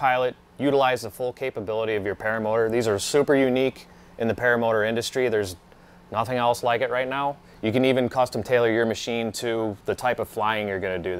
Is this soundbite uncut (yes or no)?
no